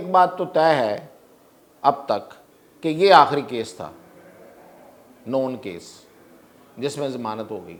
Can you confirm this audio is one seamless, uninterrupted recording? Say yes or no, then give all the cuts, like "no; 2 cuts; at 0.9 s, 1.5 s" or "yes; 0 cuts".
yes; 0 cuts